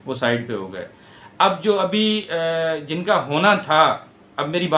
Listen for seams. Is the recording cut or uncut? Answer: uncut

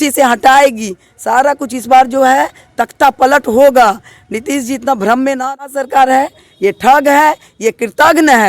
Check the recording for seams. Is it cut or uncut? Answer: cut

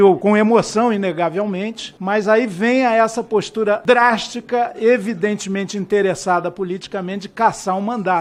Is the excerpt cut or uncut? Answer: uncut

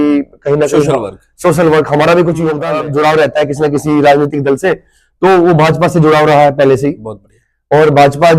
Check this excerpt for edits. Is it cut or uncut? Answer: cut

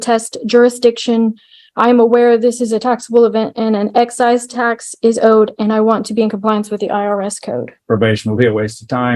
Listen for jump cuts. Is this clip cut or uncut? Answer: cut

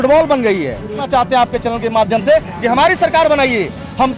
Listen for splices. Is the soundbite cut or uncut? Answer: cut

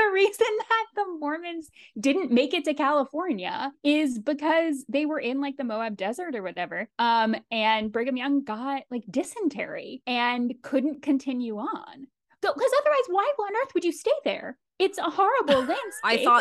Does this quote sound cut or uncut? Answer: uncut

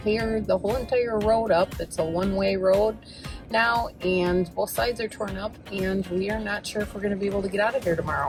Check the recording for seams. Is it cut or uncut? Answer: uncut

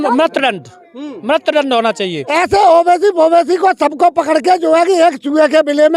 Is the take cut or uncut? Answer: cut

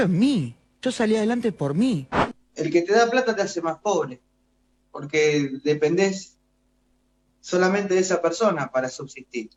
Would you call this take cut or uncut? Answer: uncut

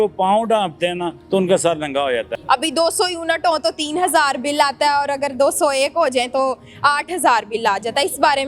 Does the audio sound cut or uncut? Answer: cut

